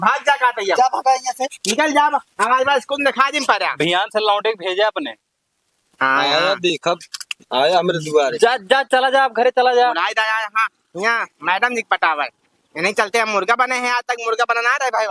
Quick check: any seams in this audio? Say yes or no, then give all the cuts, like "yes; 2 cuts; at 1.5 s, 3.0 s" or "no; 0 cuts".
no; 0 cuts